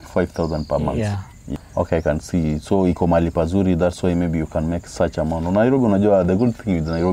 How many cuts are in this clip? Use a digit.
1